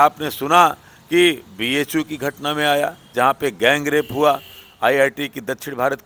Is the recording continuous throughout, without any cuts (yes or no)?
yes